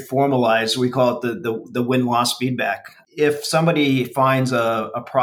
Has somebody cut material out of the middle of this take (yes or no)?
yes